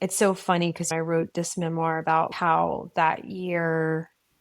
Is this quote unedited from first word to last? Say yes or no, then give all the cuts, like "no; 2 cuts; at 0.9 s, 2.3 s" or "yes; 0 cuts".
no; 2 cuts; at 0.9 s, 2.3 s